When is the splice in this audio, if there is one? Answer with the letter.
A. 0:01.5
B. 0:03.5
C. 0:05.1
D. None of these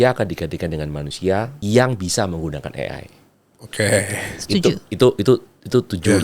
A